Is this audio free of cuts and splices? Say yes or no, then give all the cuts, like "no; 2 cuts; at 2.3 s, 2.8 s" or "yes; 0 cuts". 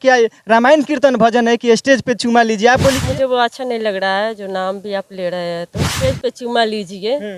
no; 2 cuts; at 3.0 s, 5.9 s